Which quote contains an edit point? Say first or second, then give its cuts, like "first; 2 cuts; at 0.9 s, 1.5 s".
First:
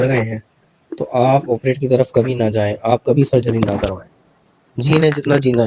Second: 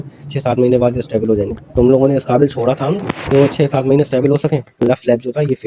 second; 1 cut; at 4.7 s